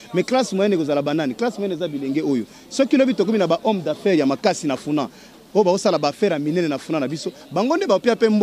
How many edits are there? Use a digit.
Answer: 0